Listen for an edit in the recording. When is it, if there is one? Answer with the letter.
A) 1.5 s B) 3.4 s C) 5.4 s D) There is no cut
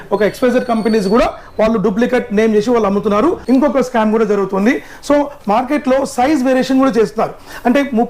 B